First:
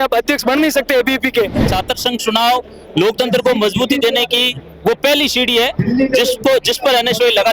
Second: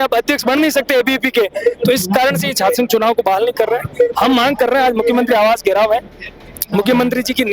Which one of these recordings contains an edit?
first; 1 cut; at 1.6 s

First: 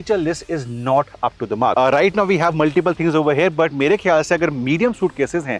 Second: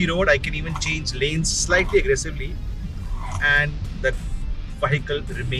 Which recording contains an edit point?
first; 1 cut; at 1.7 s

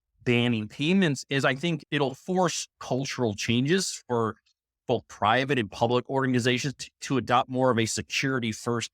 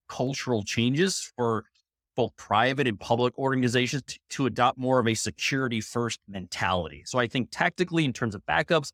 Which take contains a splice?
first; 1 cut; at 1.8 s

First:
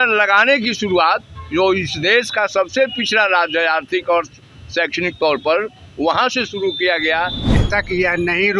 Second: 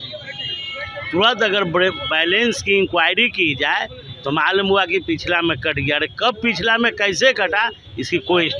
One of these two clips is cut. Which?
first; 1 cut; at 7.5 s

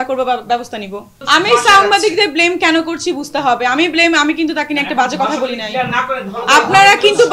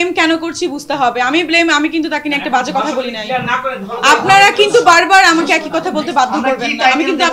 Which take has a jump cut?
first; 1 cut; at 1.1 s

